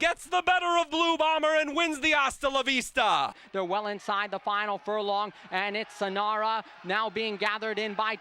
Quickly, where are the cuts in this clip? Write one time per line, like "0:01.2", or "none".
0:03.4